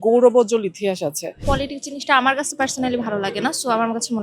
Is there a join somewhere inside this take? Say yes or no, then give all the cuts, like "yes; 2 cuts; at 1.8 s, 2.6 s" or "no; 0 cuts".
yes; 1 cut; at 1.3 s